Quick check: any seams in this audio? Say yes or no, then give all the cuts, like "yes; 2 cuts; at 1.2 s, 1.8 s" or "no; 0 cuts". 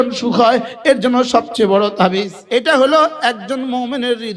yes; 1 cut; at 2.4 s